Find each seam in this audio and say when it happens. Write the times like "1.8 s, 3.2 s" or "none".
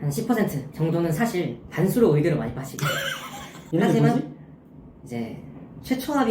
none